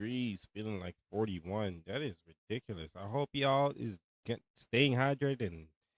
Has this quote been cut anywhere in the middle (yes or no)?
no